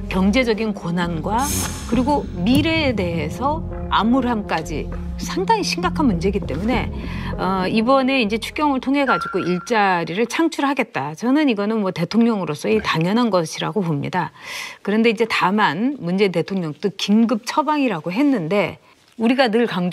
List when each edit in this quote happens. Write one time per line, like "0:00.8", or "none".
none